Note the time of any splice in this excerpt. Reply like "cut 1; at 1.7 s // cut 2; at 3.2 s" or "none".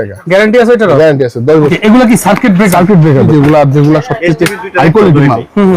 cut 1; at 1.7 s // cut 2; at 3.3 s